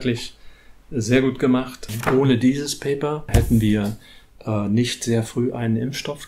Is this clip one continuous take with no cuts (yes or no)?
no